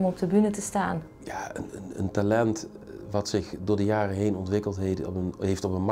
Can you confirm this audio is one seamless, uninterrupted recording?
no; 1 cut; at 1.1 s

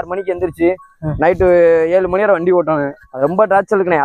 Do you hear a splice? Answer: yes; 1 cut; at 3.1 s

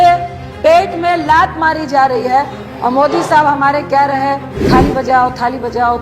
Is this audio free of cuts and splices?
no; 2 cuts; at 2.6 s, 4.5 s

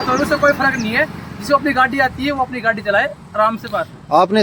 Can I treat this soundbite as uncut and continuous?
yes; 0 cuts

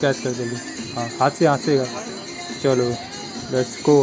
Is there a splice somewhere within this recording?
no; 0 cuts

